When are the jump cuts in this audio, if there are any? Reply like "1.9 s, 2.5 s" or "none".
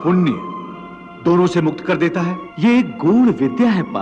2.4 s